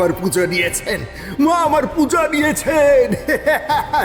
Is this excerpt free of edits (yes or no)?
yes